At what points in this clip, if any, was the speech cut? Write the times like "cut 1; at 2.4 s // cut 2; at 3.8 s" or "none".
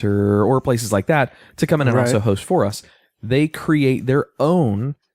none